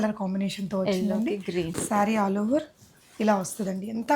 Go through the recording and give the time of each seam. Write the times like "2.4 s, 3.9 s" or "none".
1.7 s